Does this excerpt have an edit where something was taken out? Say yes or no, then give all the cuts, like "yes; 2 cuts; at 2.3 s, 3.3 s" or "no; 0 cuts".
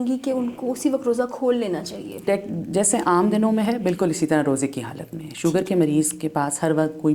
yes; 1 cut; at 2.2 s